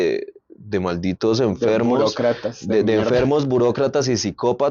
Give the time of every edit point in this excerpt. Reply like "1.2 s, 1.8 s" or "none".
none